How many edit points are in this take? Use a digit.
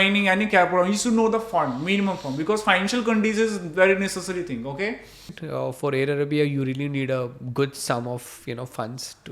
1